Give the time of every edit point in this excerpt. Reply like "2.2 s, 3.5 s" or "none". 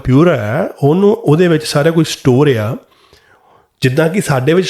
none